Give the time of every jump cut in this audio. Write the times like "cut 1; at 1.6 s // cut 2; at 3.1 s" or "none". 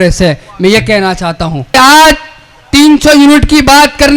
cut 1; at 1.8 s